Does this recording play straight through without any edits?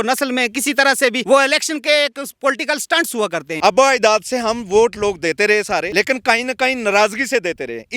no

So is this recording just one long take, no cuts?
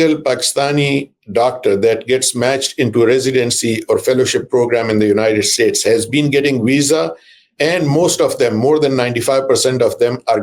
yes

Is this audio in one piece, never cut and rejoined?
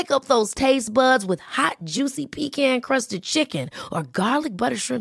yes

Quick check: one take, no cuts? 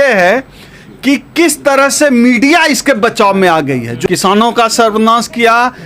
no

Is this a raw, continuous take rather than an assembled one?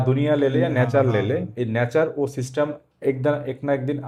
yes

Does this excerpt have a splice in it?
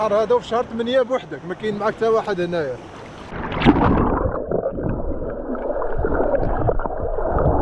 no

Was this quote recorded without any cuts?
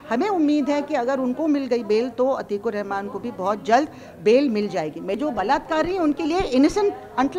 no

